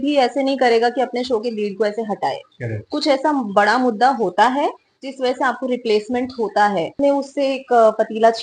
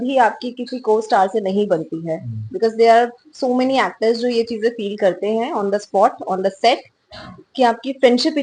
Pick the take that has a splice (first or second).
first